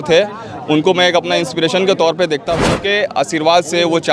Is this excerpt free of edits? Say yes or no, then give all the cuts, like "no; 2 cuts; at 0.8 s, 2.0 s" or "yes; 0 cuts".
no; 1 cut; at 2.7 s